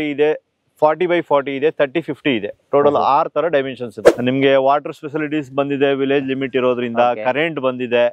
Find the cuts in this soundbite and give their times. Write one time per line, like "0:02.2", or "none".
0:04.0